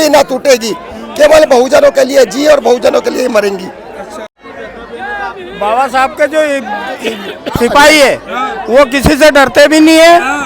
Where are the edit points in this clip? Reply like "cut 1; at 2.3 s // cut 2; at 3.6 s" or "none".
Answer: cut 1; at 4.2 s